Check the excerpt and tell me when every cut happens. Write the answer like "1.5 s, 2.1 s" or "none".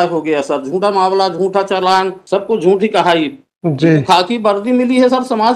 2.2 s